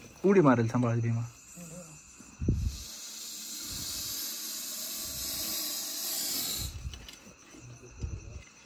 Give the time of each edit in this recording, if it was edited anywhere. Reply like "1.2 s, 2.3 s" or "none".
1.0 s